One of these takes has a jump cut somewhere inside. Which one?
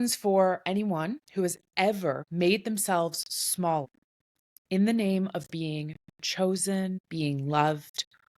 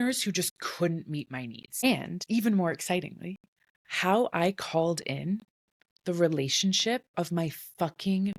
first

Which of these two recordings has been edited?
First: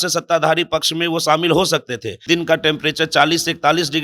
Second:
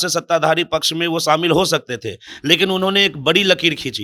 first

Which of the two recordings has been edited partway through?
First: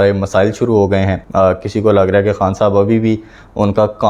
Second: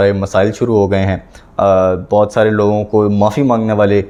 first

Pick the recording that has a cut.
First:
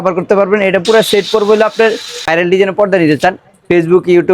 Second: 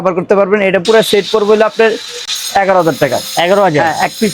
first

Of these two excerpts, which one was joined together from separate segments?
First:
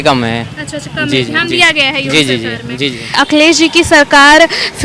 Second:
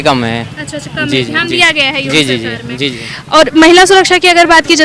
first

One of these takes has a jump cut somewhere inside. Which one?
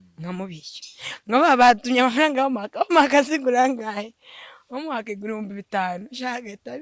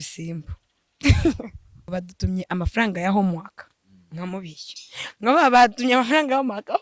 second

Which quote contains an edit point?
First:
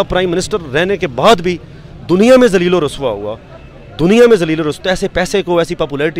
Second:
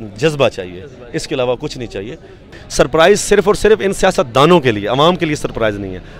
second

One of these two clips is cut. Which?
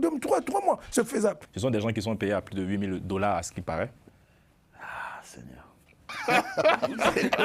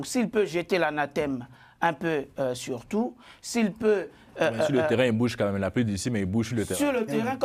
first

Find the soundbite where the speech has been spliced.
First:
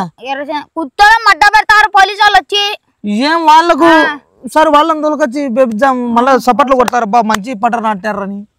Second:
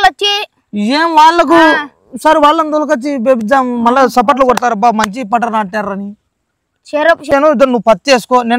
second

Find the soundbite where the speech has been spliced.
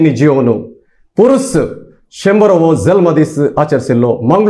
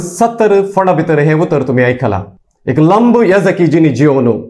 second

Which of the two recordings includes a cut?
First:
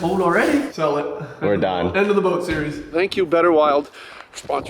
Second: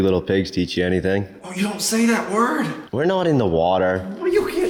first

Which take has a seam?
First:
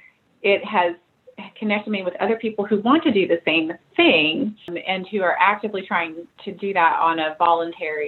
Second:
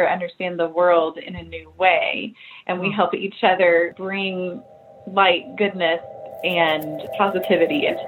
second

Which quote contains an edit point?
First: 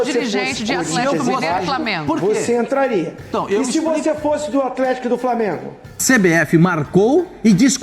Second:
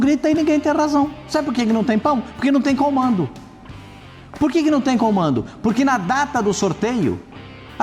first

